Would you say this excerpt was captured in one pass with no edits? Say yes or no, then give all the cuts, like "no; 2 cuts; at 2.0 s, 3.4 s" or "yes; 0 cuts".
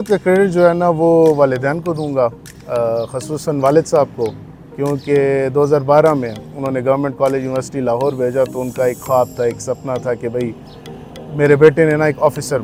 yes; 0 cuts